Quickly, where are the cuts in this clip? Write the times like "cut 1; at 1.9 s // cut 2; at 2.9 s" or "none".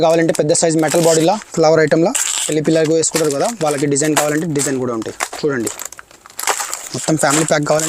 cut 1; at 6.9 s